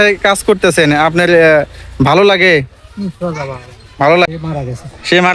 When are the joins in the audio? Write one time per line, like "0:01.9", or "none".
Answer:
0:04.3